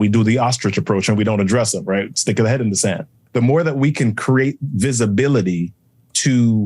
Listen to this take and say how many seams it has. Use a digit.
1